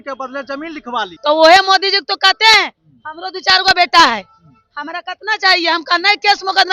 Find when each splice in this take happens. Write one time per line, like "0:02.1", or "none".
0:01.1